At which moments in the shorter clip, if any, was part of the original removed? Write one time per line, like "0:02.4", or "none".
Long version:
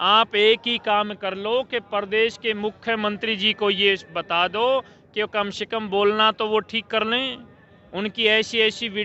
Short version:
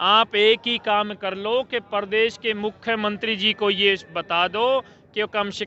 none

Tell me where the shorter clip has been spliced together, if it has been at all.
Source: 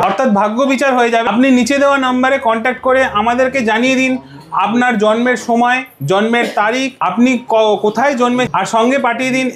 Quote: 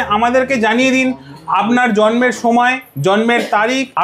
none

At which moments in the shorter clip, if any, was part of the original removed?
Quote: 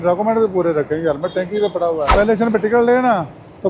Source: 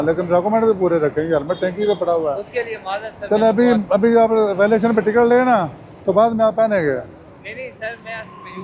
0:02.1

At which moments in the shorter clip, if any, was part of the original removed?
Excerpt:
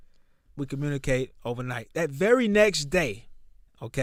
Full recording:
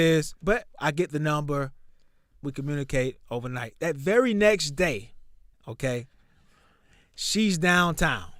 none

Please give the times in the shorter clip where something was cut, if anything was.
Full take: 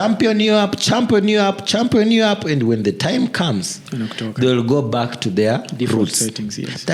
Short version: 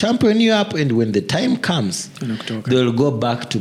none

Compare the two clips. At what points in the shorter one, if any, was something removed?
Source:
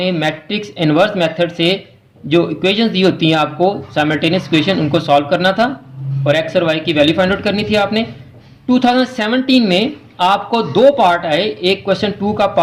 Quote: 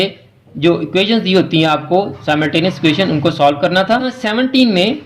0:04.2

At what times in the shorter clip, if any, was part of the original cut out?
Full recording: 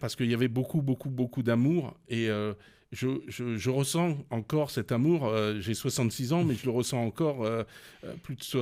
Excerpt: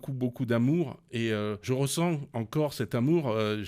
0:01.6

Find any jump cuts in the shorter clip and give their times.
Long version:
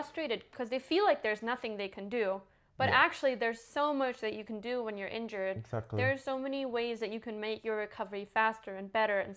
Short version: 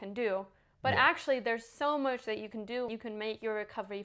0:02.9

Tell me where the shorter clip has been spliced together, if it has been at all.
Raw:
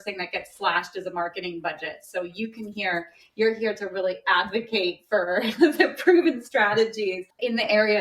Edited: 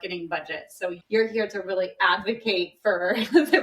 0:01.0

